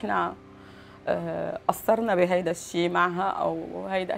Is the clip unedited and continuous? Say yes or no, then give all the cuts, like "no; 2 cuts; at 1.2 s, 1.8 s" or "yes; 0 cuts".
yes; 0 cuts